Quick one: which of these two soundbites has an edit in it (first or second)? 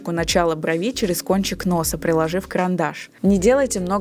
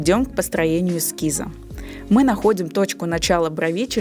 first